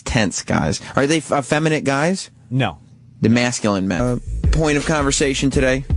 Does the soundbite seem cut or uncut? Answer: uncut